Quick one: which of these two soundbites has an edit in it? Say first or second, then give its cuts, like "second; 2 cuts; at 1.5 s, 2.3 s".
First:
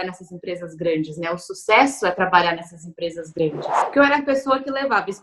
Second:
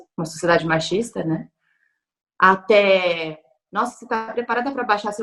first; 1 cut; at 3.4 s